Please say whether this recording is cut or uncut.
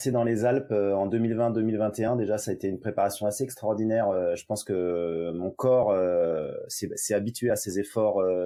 uncut